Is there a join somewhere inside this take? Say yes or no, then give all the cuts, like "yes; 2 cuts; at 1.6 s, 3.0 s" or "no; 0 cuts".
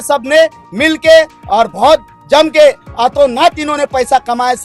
no; 0 cuts